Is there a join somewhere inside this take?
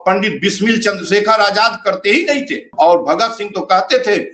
yes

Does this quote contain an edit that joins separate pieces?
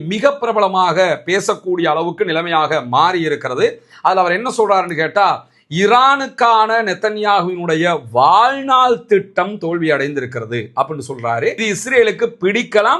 yes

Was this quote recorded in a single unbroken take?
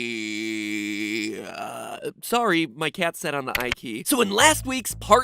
no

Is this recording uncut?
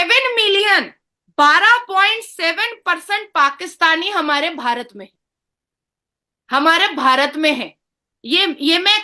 yes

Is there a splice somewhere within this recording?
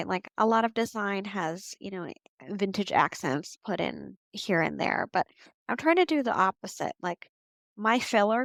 no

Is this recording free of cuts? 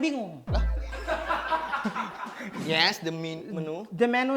no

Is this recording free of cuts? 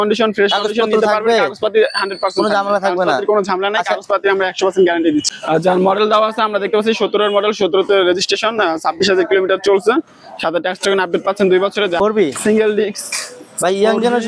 no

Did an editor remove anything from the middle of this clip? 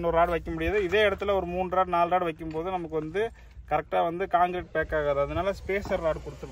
no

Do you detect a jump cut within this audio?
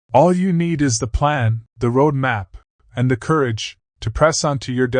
yes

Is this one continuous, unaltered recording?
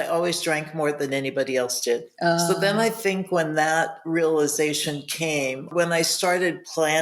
no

